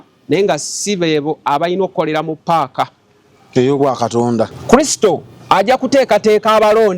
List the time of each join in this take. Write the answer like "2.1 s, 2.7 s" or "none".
4.5 s

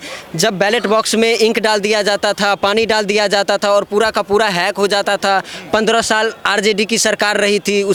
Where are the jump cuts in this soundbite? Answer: none

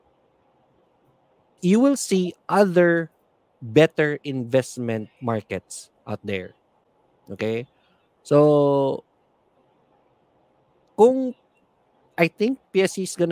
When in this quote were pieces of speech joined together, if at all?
none

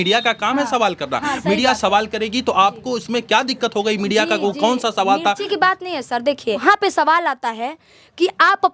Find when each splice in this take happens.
6.6 s

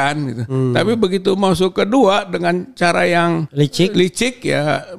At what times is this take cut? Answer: 3.5 s

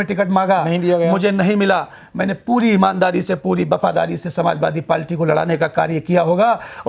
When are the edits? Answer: none

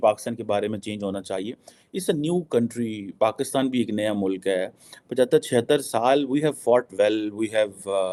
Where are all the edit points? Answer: none

